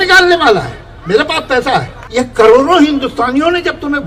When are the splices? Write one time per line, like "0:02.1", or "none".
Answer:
0:02.0